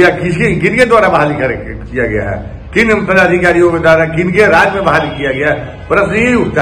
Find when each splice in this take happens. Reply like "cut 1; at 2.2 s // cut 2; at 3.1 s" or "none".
none